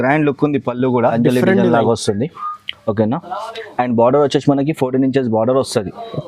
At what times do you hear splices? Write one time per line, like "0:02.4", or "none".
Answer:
0:01.1